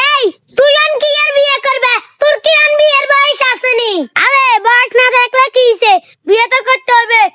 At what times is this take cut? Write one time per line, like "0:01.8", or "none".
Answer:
none

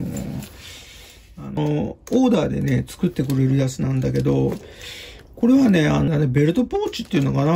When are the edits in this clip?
0:01.6
0:06.1

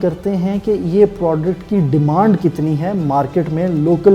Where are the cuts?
none

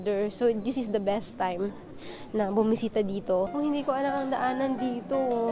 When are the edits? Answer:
0:03.5

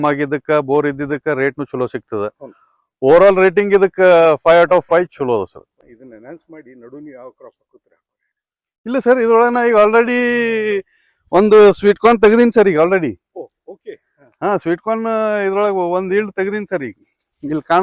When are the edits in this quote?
0:05.7

